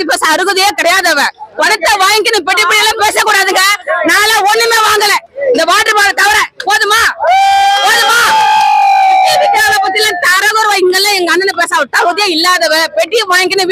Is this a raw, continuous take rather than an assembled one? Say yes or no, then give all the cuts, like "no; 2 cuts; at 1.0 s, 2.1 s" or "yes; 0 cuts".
yes; 0 cuts